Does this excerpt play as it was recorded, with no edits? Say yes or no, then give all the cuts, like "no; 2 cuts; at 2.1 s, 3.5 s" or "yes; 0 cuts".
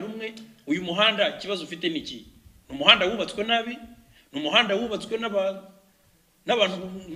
yes; 0 cuts